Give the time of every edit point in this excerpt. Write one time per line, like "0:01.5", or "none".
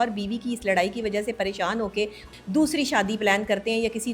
0:02.3